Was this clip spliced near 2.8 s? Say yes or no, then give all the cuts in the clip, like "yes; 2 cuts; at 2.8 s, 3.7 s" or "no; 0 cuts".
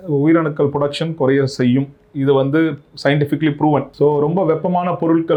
no; 0 cuts